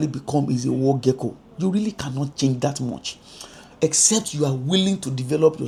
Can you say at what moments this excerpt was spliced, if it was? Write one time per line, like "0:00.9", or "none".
none